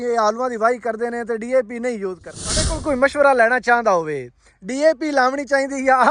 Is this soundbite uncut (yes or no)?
no